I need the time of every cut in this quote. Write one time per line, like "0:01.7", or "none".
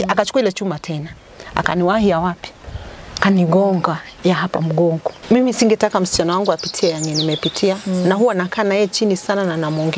0:05.1